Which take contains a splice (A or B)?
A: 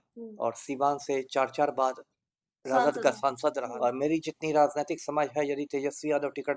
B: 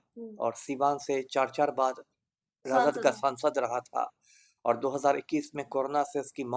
A